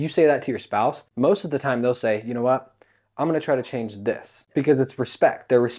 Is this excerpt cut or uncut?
cut